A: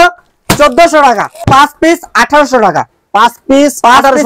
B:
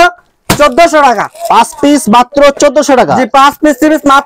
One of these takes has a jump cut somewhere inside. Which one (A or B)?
A